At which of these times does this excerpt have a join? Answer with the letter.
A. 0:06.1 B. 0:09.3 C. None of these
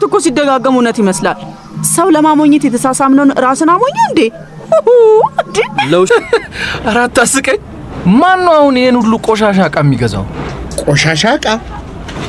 A